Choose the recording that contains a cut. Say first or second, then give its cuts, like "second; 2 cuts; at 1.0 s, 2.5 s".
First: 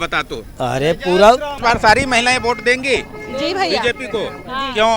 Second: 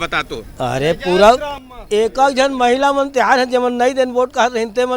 first; 1 cut; at 1.5 s